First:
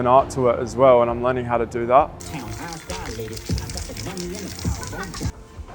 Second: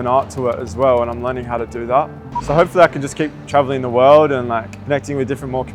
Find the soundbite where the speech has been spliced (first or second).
second